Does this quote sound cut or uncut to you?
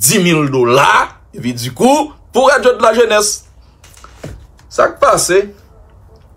uncut